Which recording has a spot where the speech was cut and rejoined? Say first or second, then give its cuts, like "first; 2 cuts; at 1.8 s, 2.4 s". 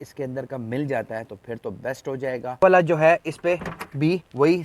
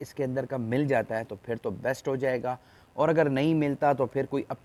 first; 1 cut; at 2.6 s